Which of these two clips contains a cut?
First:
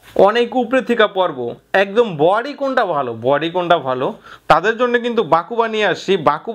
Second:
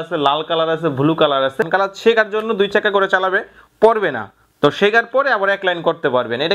second; 1 cut; at 1.6 s

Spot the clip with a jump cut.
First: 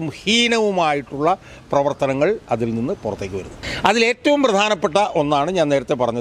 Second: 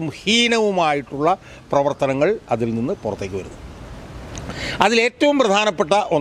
first; 1 cut; at 3.6 s

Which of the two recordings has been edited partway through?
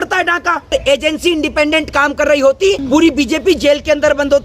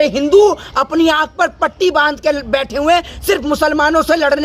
first; 2 cuts; at 0.7 s, 2.8 s

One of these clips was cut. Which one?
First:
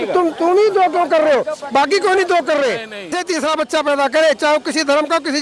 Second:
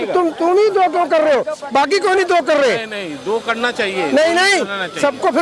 first; 1 cut; at 3.2 s

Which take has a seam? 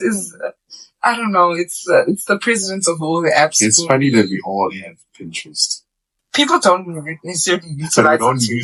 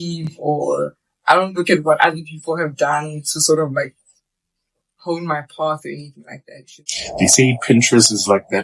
second; 1 cut; at 6.8 s

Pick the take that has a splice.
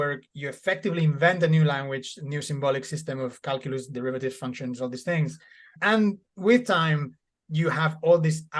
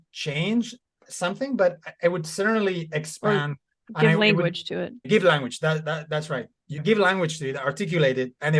second; 2 cuts; at 5.0 s, 6.6 s

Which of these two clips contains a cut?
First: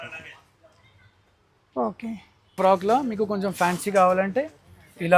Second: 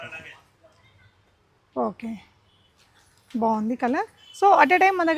first; 1 cut; at 2.5 s

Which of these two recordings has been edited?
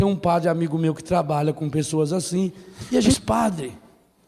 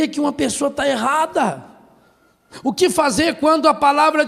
first; 1 cut; at 3.2 s

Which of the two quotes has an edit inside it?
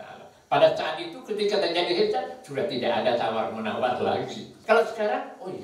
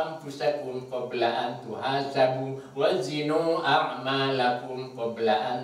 first; 1 cut; at 4.5 s

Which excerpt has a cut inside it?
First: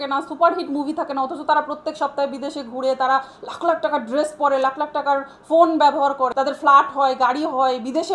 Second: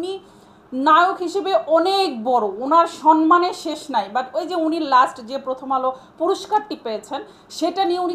first; 1 cut; at 6.3 s

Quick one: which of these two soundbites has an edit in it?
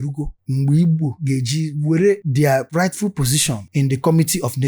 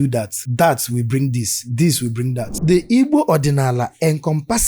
second; 1 cut; at 2.6 s

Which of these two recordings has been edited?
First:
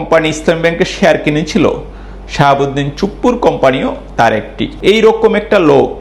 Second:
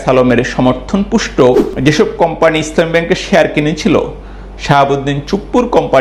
first; 1 cut; at 4.7 s

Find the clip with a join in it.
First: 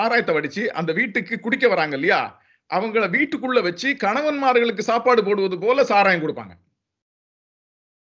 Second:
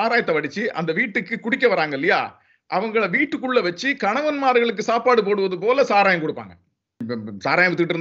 second; 1 cut; at 7.0 s

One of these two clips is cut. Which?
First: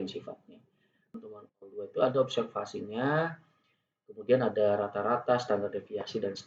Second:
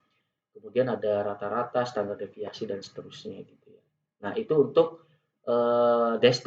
first; 1 cut; at 1.1 s

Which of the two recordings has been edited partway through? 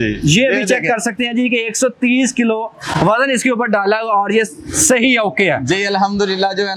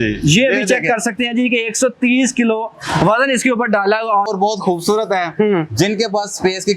second; 1 cut; at 4.3 s

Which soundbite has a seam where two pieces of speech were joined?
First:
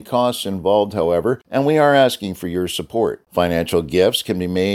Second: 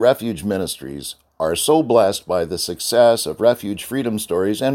first; 2 cuts; at 1.4 s, 3.2 s

